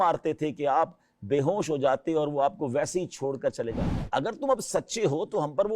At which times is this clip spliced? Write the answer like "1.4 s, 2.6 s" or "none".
3.9 s